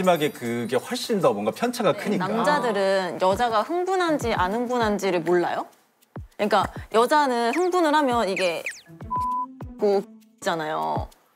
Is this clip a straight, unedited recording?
no; 1 cut; at 2.3 s

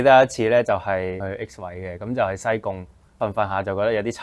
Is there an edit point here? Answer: yes; 2 cuts; at 1.2 s, 3.2 s

